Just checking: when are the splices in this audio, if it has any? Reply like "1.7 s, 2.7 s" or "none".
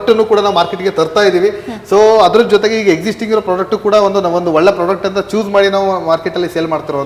none